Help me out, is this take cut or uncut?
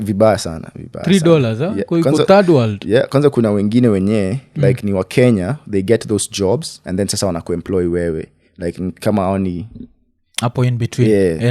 uncut